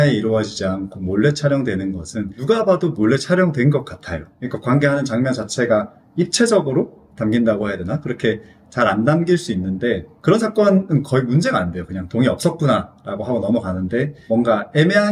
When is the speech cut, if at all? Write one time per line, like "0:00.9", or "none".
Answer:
none